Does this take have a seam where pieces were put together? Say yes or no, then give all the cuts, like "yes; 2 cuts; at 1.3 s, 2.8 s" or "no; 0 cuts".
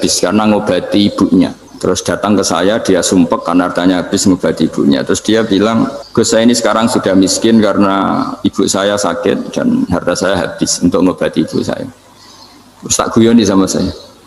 yes; 2 cuts; at 1.6 s, 6.0 s